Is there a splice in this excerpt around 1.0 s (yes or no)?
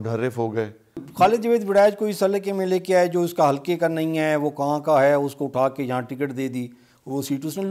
yes